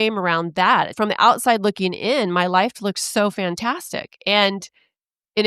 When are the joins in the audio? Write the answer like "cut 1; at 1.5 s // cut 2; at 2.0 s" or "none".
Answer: cut 1; at 0.9 s